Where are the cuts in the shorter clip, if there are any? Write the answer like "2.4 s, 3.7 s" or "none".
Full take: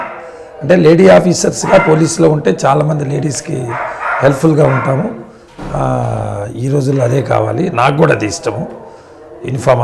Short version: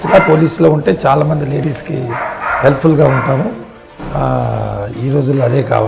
none